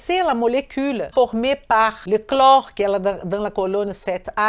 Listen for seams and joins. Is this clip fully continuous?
no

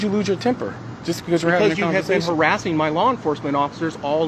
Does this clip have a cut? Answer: no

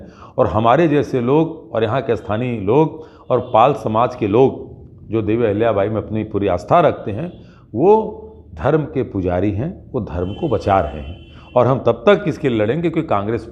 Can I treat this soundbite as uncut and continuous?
yes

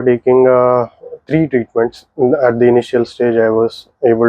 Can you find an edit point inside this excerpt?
no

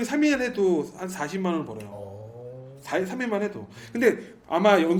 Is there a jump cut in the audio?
no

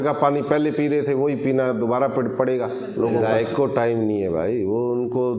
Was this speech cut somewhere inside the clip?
yes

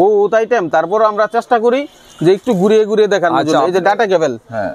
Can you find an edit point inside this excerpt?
no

